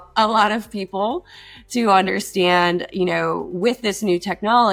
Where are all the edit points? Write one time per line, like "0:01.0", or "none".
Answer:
none

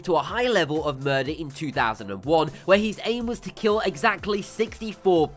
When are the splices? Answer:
0:02.1

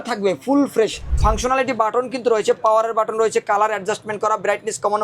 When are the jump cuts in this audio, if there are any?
0:01.1

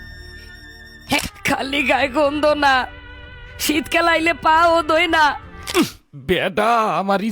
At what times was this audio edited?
0:01.2
0:05.6

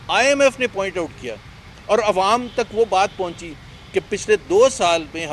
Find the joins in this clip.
none

